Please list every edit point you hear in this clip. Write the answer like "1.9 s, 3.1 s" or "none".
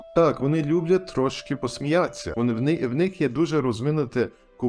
1.6 s, 2.2 s